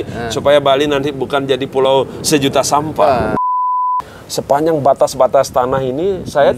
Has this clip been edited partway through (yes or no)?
yes